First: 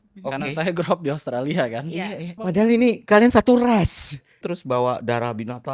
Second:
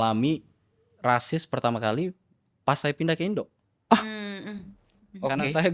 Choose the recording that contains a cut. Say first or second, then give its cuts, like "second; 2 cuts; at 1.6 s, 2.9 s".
first; 2 cuts; at 2.4 s, 4.4 s